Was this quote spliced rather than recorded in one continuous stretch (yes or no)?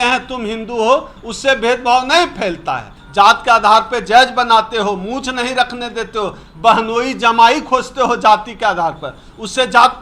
yes